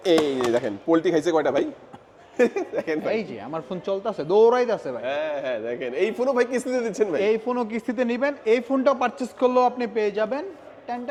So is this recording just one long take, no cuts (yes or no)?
yes